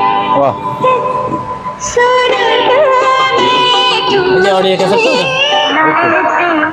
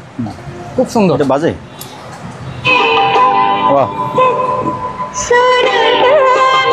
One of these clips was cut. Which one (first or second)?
first